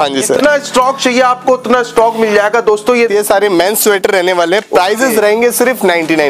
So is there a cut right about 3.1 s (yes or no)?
yes